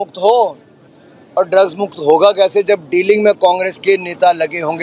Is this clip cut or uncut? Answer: uncut